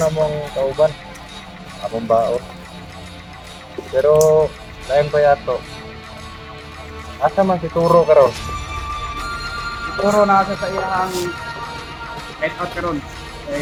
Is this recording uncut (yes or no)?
yes